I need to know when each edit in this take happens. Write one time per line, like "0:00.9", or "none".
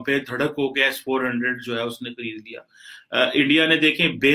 none